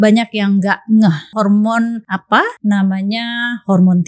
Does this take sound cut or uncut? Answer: cut